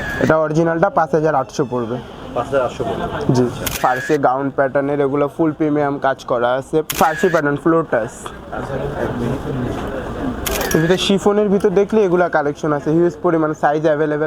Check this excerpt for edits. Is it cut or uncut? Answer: cut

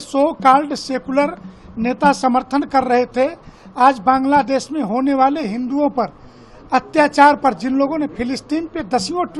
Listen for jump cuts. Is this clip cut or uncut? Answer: uncut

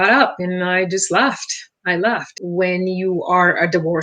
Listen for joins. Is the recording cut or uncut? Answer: cut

